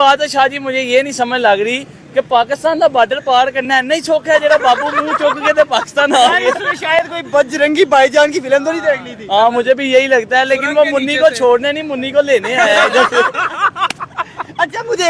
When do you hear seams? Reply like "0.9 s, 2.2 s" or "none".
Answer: none

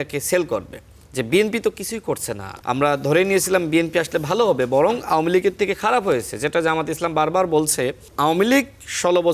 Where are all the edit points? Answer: 2.5 s, 8.0 s

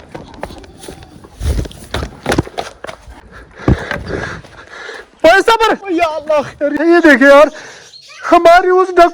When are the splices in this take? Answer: 6.8 s

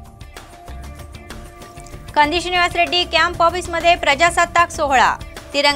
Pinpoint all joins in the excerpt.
none

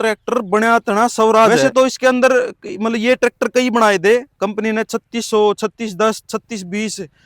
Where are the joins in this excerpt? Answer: 1.6 s

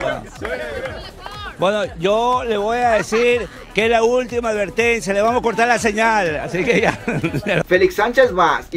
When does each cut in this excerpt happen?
7.6 s

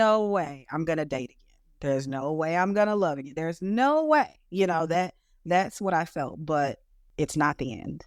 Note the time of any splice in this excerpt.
7.0 s

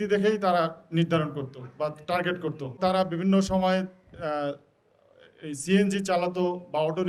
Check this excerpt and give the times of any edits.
2.8 s

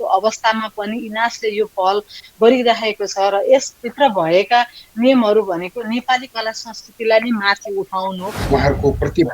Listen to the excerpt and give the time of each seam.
8.3 s

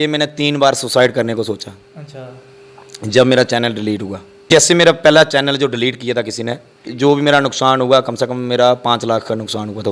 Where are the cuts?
4.5 s, 6.9 s

